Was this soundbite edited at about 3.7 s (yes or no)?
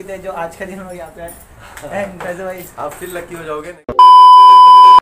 yes